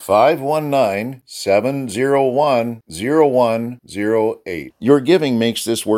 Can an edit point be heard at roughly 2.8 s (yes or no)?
no